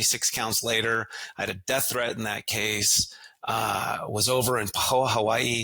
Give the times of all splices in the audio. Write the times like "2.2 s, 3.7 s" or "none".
none